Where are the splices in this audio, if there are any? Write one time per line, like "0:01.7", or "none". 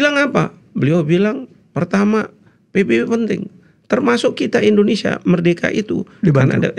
none